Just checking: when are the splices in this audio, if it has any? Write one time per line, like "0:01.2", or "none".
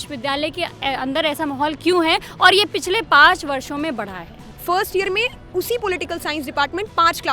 0:04.4